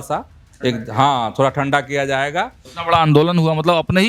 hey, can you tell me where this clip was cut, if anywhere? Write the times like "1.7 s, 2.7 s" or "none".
2.6 s